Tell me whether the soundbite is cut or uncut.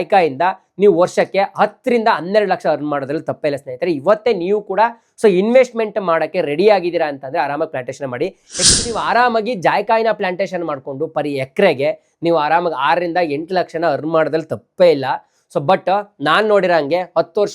cut